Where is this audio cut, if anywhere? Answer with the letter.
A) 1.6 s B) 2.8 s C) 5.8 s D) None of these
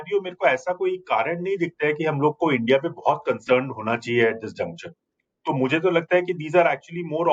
D